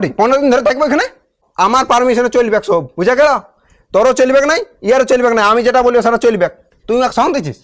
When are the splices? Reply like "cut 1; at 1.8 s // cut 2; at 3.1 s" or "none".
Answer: cut 1; at 1.4 s // cut 2; at 6.7 s